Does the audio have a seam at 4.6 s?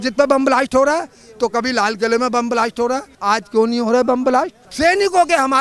yes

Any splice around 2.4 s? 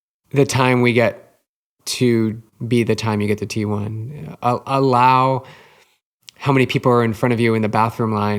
yes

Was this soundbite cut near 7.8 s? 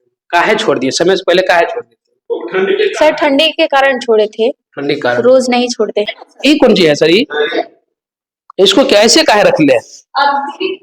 no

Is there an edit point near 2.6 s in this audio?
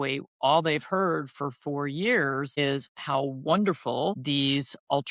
yes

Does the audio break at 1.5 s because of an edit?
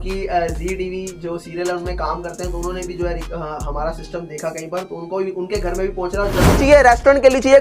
no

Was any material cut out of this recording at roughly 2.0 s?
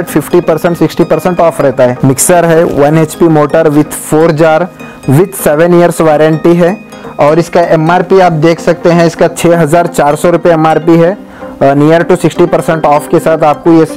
yes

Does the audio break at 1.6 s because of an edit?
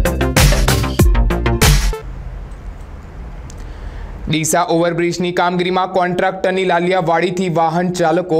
yes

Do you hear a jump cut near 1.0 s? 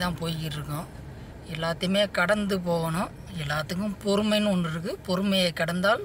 no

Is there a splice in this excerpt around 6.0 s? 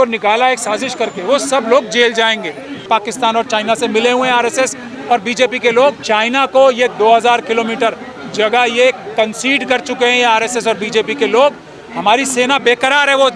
yes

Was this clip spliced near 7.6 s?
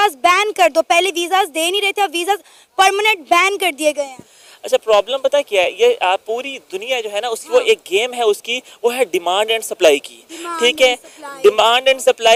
no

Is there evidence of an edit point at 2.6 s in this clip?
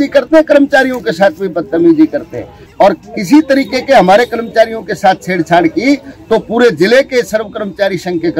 yes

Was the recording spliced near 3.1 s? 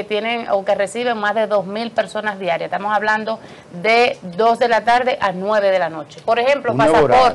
no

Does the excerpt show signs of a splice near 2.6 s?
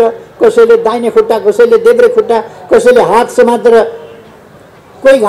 no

